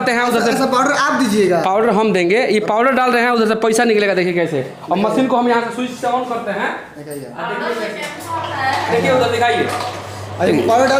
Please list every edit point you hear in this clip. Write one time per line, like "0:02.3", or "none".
none